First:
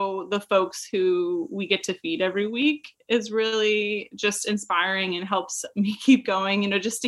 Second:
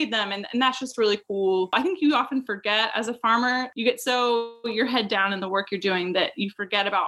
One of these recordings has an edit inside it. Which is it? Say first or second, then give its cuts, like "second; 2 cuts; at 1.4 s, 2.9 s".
second; 2 cuts; at 1.7 s, 3.7 s